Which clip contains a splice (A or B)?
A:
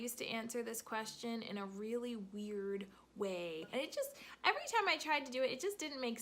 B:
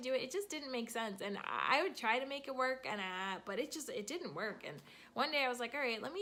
A